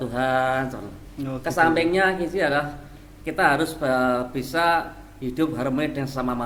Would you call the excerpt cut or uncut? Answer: uncut